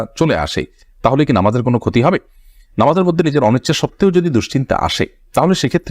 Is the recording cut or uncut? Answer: uncut